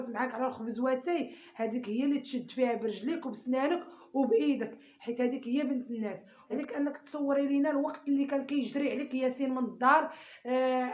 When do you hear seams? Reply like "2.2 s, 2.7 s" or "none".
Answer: 6.6 s